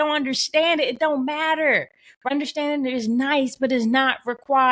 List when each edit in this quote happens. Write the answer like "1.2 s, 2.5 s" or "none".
2.3 s